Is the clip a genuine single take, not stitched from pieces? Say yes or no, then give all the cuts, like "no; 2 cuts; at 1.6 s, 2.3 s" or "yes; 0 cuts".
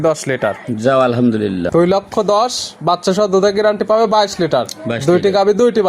no; 1 cut; at 1.7 s